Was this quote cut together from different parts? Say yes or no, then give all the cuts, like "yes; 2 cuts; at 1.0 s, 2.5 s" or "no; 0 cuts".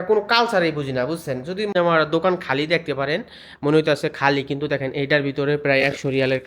yes; 1 cut; at 1.7 s